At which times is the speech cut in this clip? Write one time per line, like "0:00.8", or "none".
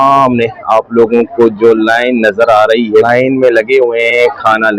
0:03.1